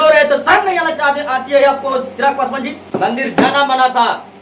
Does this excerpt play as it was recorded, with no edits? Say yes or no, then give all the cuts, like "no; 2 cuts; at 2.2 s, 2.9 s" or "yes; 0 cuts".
no; 1 cut; at 2.8 s